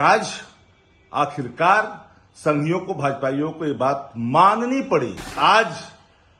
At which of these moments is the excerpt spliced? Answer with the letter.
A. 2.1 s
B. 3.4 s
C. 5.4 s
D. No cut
C